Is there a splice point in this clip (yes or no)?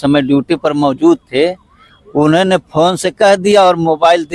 no